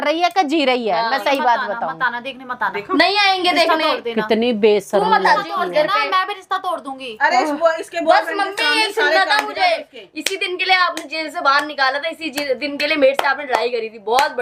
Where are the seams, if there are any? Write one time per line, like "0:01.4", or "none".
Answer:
none